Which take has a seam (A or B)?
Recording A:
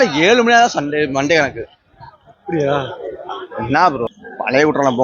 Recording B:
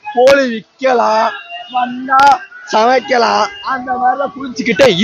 A